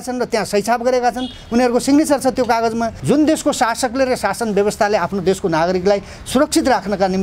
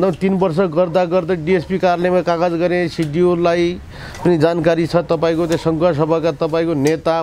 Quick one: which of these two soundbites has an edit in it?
first; 1 cut; at 2.9 s

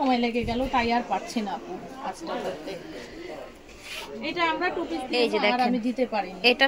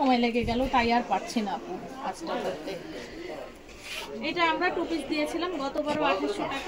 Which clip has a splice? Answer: first; 1 cut; at 5.1 s

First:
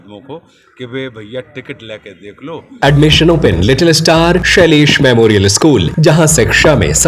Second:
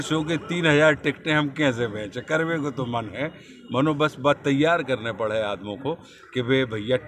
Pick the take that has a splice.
first; 3 cuts; at 2.8 s, 4.4 s, 5.9 s

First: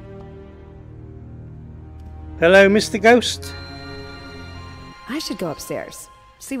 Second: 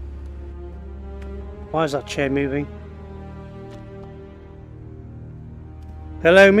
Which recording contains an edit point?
first; 1 cut; at 4.7 s

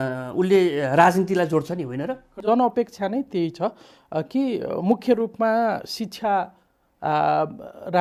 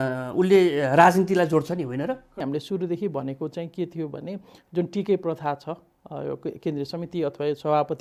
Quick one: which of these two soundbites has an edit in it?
second; 1 cut; at 2.3 s

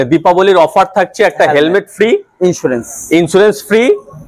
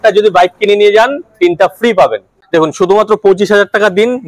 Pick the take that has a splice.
second; 1 cut; at 2.3 s

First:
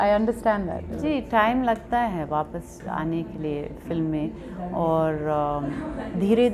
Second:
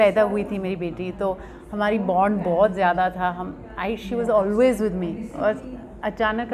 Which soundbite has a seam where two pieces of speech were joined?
first; 1 cut; at 0.9 s

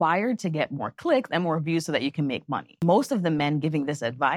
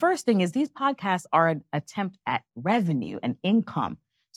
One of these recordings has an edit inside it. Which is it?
first; 1 cut; at 2.8 s

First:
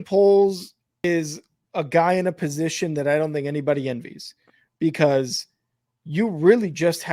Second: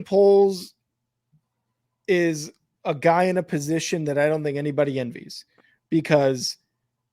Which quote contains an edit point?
first; 1 cut; at 1.0 s

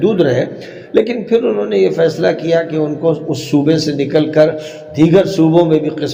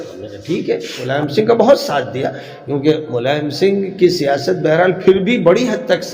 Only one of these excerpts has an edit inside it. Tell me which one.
second; 1 cut; at 1.1 s

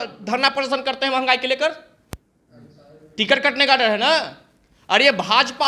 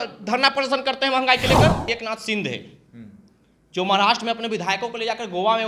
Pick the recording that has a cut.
second; 1 cut; at 1.8 s

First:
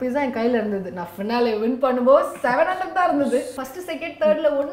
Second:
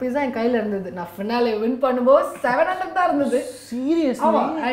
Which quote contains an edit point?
first; 1 cut; at 3.6 s

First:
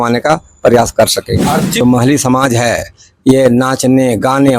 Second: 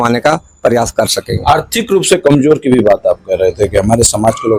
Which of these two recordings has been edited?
first; 1 cut; at 1.8 s

